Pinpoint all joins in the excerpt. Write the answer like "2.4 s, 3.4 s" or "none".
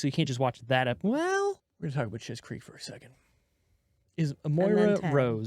1.7 s